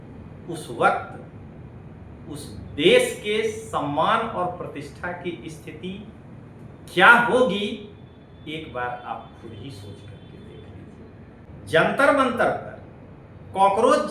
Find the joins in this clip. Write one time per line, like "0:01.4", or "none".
0:11.5